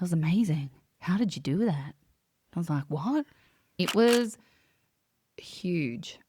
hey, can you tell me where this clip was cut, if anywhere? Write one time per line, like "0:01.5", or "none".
0:03.8